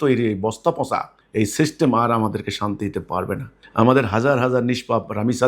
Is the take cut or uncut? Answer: cut